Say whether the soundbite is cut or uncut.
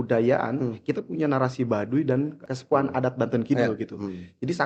cut